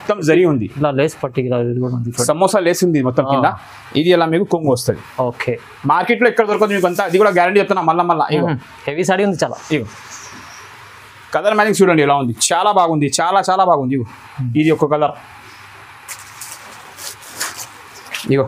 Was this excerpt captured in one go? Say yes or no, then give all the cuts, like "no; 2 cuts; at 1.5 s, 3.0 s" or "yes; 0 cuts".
yes; 0 cuts